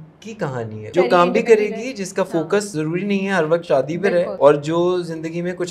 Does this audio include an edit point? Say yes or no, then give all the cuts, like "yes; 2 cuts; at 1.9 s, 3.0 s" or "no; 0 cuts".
yes; 3 cuts; at 0.9 s, 2.7 s, 4.3 s